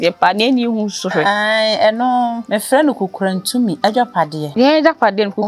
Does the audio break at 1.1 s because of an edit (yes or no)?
no